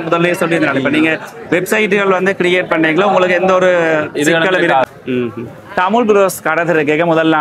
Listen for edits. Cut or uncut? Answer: cut